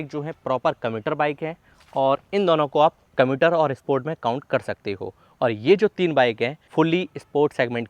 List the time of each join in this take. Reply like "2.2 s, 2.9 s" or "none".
3.0 s, 6.6 s